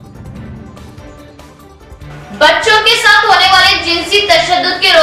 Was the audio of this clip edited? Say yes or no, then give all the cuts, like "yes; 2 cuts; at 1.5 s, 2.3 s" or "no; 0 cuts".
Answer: yes; 1 cut; at 1.2 s